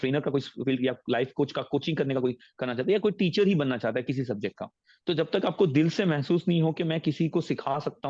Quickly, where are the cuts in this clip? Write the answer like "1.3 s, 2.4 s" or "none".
none